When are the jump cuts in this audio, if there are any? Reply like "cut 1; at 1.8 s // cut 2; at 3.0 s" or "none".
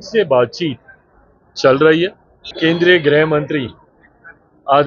cut 1; at 2.5 s